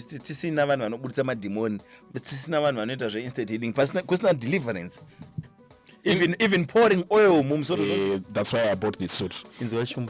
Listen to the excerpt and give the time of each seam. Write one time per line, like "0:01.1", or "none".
0:07.7